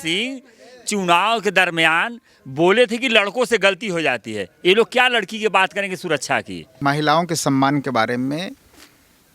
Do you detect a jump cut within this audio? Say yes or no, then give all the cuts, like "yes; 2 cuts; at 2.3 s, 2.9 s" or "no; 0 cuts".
yes; 1 cut; at 6.6 s